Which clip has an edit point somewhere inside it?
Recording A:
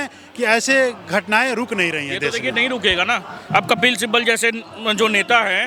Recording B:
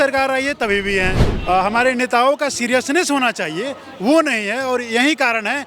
B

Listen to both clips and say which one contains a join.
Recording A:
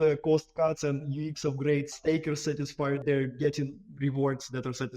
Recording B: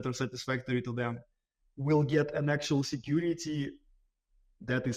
A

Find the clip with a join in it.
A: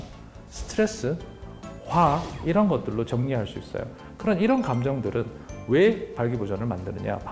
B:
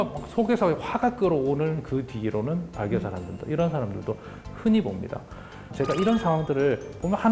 B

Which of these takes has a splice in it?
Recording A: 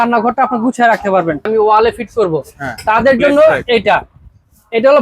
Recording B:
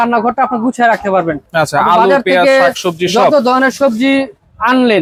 A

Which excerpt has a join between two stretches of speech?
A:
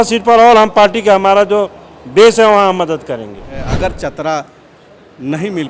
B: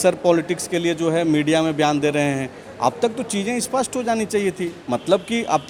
A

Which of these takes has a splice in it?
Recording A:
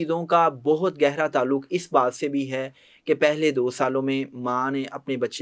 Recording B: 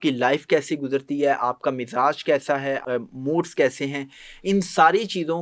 B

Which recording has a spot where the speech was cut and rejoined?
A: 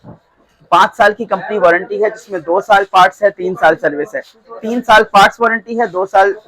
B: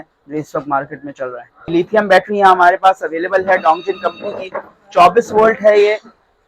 B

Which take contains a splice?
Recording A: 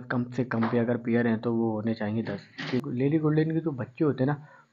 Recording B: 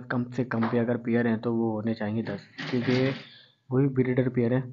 A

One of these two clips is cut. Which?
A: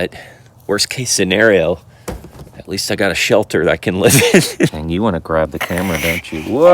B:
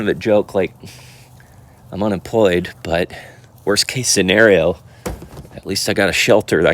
A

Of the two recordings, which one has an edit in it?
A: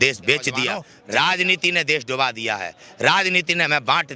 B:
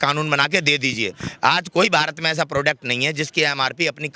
A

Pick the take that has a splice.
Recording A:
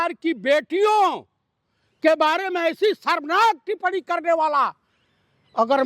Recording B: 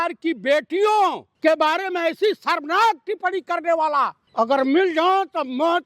B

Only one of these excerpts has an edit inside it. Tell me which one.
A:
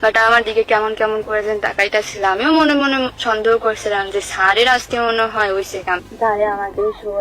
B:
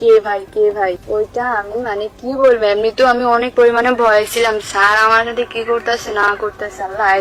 A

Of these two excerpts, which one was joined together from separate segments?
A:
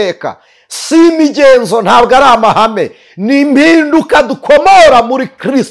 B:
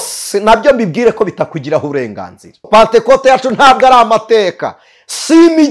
B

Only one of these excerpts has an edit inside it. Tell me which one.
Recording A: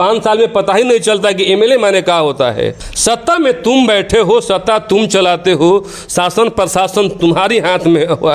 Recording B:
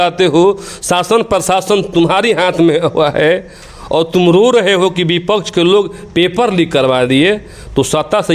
A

